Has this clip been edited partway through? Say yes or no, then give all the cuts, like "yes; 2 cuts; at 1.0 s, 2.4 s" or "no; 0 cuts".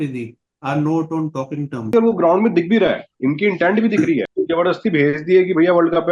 yes; 1 cut; at 1.8 s